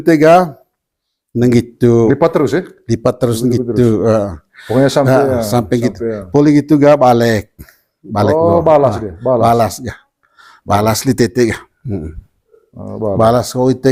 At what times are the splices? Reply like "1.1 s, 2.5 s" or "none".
none